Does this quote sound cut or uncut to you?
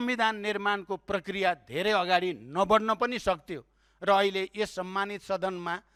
uncut